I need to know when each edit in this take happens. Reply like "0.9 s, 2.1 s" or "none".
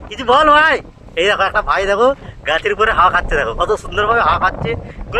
none